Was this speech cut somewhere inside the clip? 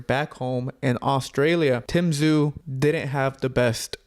yes; 2 cuts; at 1.8 s, 2.6 s

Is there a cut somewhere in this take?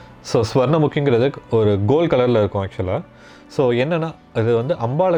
no; 0 cuts

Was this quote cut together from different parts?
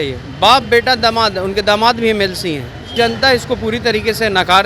yes; 1 cut; at 2.9 s

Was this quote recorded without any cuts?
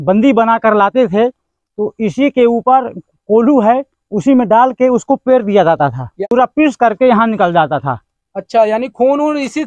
no; 1 cut; at 6.1 s

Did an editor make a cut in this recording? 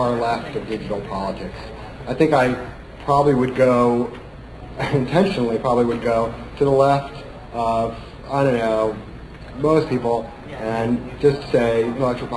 no; 0 cuts

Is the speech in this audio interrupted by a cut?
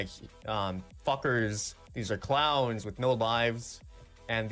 no; 0 cuts

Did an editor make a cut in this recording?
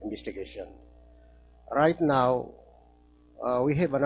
no; 0 cuts

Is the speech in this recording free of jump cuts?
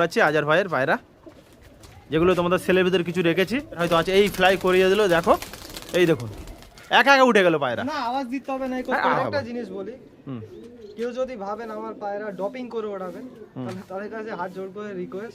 no; 2 cuts; at 3.8 s, 9.1 s

